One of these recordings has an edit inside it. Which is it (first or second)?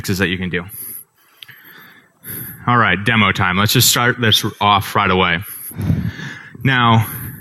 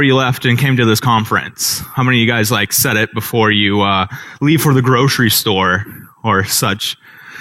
second